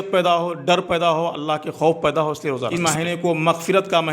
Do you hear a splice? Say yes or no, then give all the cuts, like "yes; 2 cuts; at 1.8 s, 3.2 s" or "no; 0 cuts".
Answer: yes; 1 cut; at 2.8 s